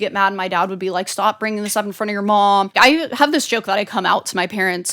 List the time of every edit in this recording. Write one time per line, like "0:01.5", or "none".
0:02.7